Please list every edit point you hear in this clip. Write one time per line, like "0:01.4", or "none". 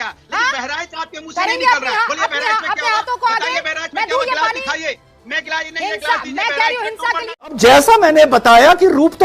0:07.6